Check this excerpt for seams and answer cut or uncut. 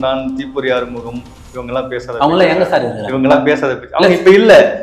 uncut